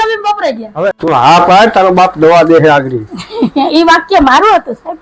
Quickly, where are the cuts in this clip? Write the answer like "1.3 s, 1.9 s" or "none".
1.0 s